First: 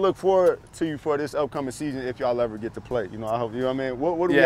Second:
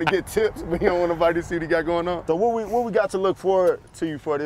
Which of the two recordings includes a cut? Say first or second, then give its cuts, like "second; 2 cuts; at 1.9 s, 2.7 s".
second; 1 cut; at 2.2 s